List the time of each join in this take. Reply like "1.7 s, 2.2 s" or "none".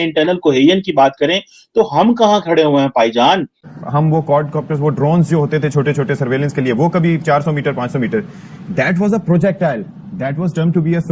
3.7 s